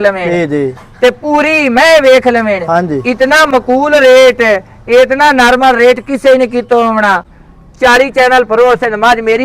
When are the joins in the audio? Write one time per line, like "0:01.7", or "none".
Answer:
0:07.3